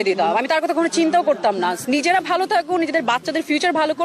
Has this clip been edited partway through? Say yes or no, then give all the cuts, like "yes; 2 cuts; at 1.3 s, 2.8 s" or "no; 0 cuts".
yes; 1 cut; at 1.8 s